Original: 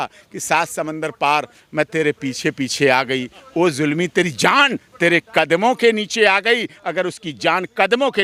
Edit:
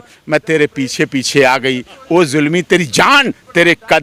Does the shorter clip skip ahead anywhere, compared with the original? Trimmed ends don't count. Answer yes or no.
no